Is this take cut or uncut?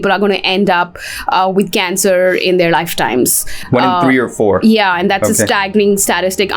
uncut